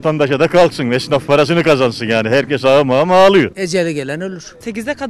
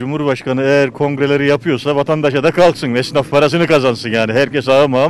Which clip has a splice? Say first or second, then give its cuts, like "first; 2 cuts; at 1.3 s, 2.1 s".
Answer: first; 1 cut; at 4.2 s